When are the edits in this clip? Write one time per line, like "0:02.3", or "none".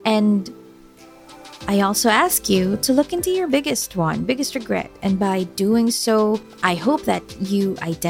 0:06.5